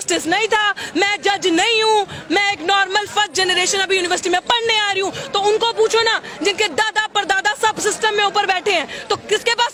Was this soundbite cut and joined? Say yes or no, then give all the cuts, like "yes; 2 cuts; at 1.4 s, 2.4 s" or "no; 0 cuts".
no; 0 cuts